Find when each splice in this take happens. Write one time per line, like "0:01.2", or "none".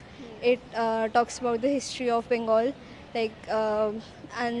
none